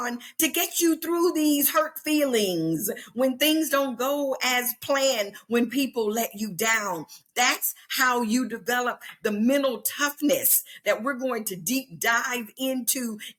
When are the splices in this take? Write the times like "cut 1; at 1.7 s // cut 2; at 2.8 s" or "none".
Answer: none